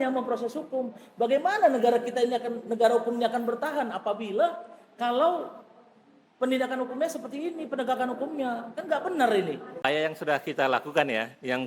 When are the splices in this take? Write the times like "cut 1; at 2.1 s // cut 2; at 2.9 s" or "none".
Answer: cut 1; at 9.9 s